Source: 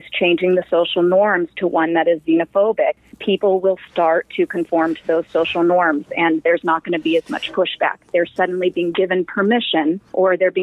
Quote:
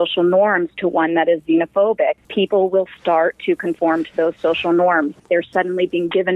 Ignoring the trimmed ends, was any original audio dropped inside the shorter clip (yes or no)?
yes